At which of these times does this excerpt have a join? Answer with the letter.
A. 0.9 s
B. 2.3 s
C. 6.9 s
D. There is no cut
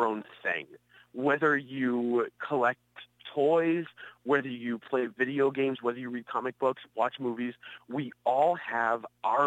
B